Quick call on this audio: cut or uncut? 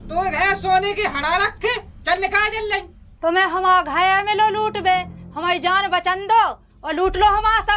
cut